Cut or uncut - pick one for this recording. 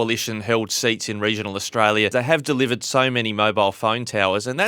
cut